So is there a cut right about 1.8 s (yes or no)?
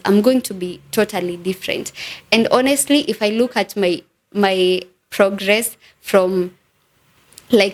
no